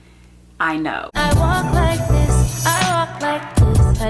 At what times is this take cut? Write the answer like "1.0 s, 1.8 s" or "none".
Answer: 1.1 s